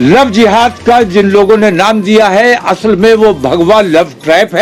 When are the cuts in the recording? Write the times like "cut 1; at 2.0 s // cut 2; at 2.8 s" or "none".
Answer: none

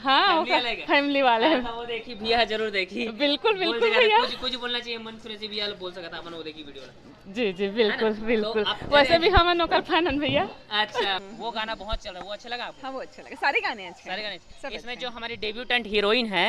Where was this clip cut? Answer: cut 1; at 11.3 s

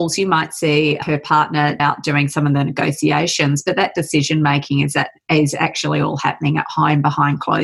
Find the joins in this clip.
cut 1; at 1.8 s

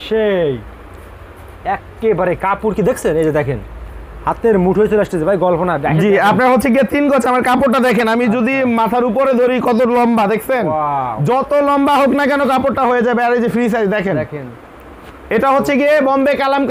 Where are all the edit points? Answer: none

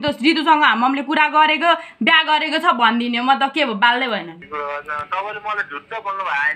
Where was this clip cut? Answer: cut 1; at 4.4 s

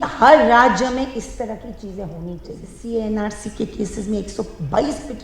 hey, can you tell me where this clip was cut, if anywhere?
cut 1; at 2.7 s

